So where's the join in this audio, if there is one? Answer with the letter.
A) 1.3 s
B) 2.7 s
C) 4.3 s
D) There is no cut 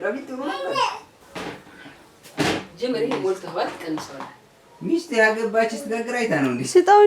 A